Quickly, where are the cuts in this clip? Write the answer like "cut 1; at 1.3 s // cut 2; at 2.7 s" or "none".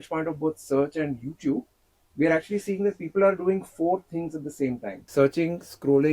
cut 1; at 4.9 s